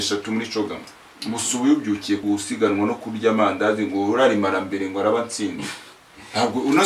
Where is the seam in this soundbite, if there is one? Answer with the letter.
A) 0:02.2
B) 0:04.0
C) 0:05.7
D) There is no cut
A